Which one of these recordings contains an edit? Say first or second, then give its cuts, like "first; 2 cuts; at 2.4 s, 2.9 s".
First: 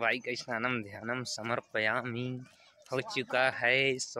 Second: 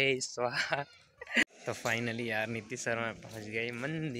second; 1 cut; at 1.5 s